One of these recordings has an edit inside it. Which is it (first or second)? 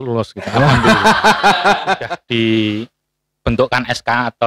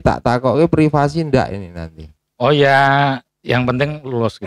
first